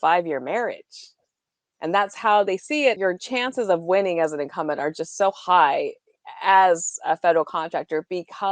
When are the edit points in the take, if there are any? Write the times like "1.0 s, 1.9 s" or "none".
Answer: 3.0 s